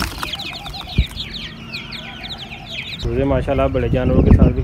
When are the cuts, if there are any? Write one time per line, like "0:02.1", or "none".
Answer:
0:03.0